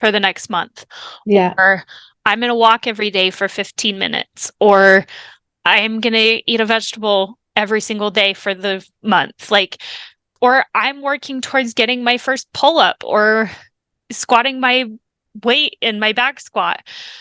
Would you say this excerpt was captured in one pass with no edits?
no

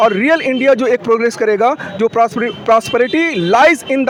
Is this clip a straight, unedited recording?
yes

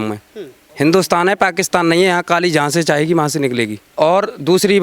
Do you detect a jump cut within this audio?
no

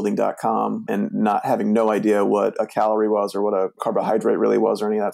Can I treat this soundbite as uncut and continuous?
yes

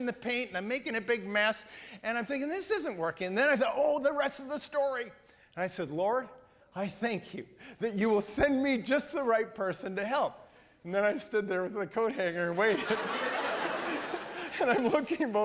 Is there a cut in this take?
no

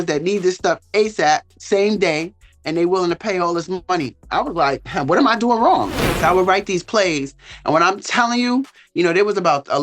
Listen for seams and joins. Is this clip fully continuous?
no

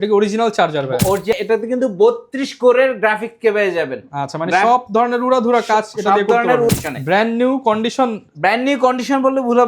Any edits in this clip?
yes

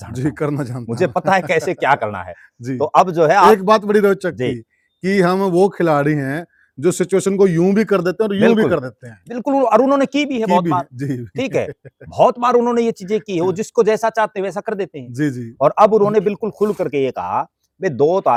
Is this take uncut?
yes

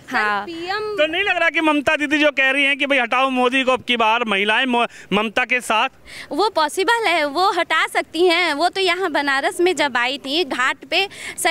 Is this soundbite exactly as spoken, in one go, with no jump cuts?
yes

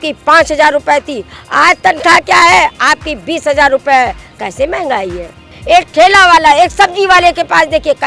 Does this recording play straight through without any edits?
no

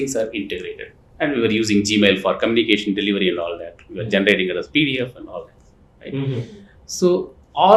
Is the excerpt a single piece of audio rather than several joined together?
yes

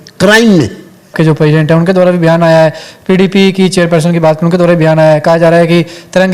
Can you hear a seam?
yes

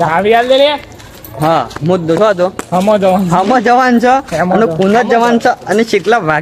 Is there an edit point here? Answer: no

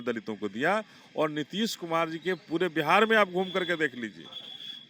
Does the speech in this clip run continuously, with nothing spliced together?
yes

